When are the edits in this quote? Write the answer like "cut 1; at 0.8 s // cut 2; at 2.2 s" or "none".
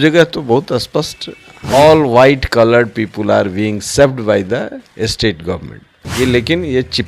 cut 1; at 1.7 s // cut 2; at 6.1 s